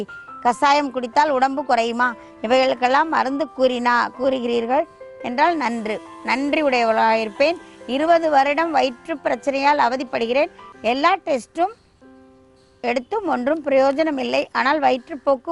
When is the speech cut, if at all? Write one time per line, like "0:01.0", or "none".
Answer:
none